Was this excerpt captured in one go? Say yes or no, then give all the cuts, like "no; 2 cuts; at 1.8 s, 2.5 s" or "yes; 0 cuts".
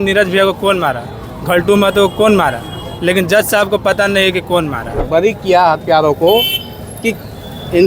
no; 1 cut; at 5.0 s